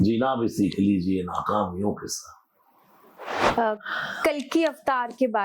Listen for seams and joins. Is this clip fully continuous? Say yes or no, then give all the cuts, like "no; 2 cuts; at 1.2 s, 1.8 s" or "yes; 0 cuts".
no; 1 cut; at 3.4 s